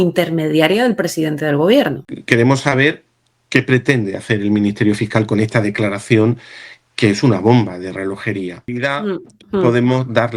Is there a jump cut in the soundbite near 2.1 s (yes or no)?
yes